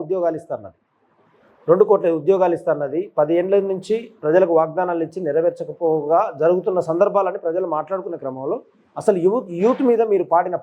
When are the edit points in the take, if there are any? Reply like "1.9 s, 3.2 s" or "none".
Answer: none